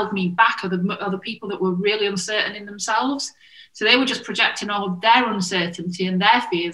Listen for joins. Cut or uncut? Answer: uncut